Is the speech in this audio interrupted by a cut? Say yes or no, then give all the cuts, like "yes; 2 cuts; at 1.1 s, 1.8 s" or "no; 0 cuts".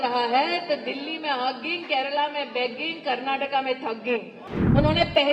yes; 1 cut; at 4.4 s